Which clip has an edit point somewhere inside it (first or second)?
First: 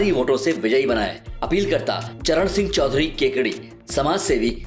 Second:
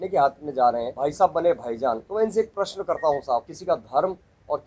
second